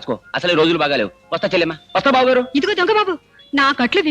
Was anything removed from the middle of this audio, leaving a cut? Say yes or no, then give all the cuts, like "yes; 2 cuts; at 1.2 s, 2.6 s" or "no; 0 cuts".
no; 0 cuts